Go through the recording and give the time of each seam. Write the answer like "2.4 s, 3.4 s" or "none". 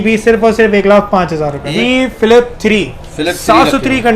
1.6 s